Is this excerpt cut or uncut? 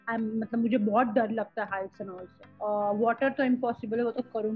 uncut